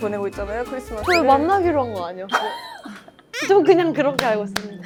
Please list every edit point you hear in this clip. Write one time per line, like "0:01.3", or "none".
none